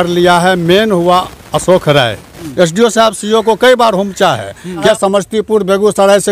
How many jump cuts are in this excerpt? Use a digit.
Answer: 2